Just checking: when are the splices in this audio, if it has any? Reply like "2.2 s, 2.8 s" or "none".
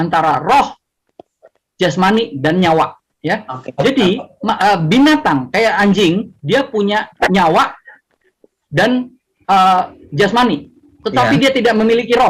none